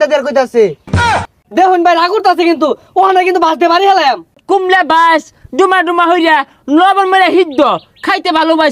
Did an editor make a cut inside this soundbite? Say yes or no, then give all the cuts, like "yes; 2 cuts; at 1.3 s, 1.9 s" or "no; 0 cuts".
yes; 2 cuts; at 1.1 s, 4.4 s